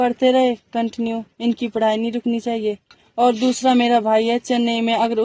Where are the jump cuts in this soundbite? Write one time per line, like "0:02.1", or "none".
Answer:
0:03.0